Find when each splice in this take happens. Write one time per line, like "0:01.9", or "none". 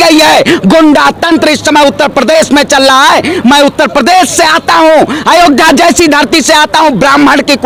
none